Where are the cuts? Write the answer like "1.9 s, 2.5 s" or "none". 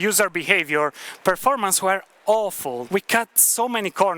2.8 s